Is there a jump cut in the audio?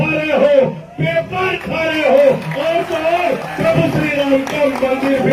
no; 0 cuts

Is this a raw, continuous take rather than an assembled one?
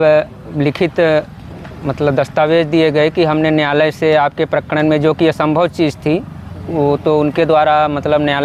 yes; 0 cuts

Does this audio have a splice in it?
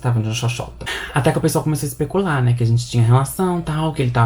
yes; 1 cut; at 1.0 s

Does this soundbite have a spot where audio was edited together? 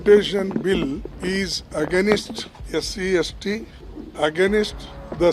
no; 0 cuts

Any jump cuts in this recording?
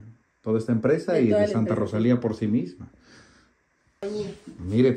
yes; 1 cut; at 4.0 s

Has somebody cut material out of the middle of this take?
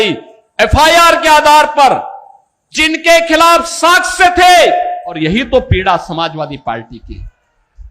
yes; 1 cut; at 5.1 s

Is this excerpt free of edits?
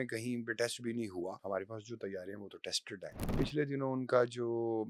no; 2 cuts; at 1.4 s, 3.4 s

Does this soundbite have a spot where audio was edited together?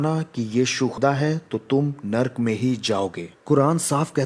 yes; 2 cuts; at 1.0 s, 3.3 s

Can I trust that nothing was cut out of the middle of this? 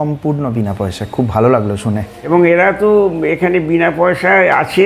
no; 1 cut; at 2.2 s

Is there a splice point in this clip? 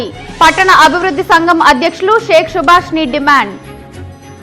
no; 0 cuts

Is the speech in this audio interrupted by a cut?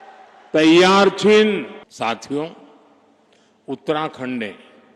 yes; 1 cut; at 1.8 s

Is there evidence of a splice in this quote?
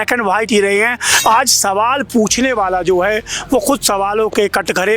yes; 1 cut; at 1.1 s

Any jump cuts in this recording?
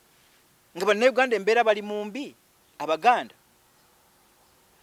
no; 0 cuts

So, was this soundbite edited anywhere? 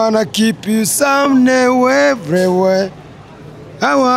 no; 0 cuts

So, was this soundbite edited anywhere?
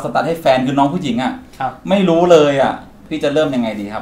yes; 1 cut; at 3.0 s

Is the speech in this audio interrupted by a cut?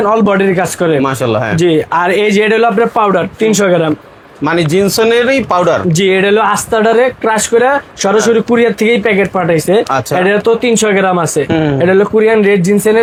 no; 0 cuts

